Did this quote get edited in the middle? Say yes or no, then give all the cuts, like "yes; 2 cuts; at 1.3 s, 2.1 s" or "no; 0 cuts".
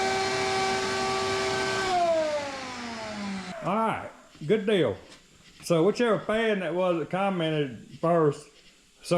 yes; 1 cut; at 3.5 s